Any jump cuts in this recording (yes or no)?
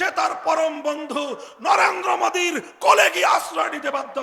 no